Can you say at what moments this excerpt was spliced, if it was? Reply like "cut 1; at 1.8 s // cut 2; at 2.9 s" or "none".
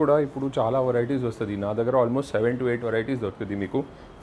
none